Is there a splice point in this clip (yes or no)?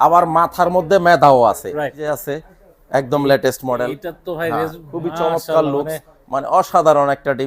yes